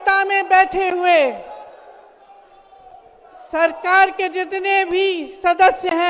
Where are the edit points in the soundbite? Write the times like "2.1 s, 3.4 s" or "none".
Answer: none